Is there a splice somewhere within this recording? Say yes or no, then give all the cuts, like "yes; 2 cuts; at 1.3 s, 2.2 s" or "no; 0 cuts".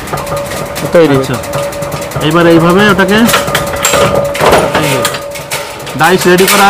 no; 0 cuts